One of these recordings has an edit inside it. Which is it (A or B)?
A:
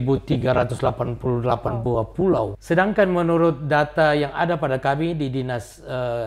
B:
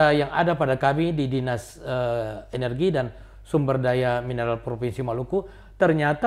A